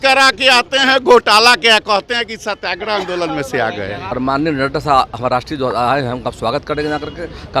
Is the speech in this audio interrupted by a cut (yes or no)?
yes